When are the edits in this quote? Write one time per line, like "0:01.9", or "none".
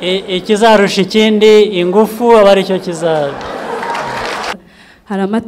0:04.6